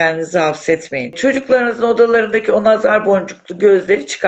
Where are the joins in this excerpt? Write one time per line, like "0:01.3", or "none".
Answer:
0:01.2